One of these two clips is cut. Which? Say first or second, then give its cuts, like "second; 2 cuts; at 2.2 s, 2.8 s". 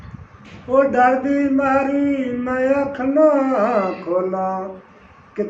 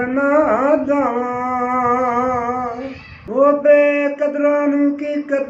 second; 1 cut; at 3.1 s